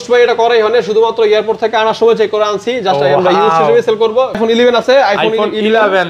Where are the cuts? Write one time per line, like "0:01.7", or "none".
0:04.4